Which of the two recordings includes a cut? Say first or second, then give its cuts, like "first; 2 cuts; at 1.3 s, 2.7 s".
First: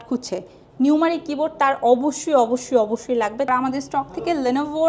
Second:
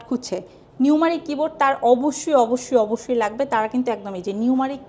first; 1 cut; at 3.5 s